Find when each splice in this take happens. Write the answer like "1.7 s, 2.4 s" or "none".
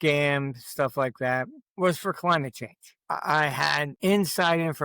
1.6 s, 3.0 s, 3.9 s